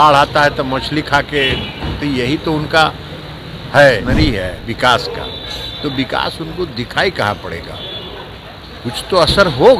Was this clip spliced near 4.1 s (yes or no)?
yes